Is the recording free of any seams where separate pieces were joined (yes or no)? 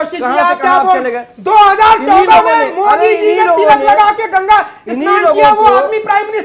yes